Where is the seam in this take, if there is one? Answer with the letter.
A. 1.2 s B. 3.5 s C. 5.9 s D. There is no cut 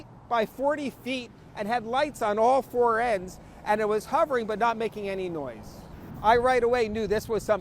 C